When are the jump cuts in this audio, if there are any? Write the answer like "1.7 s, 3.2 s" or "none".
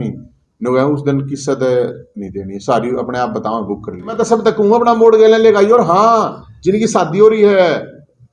4.2 s